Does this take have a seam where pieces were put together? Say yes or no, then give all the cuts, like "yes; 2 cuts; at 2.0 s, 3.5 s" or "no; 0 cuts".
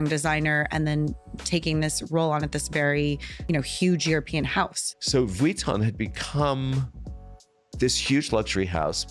yes; 1 cut; at 4.8 s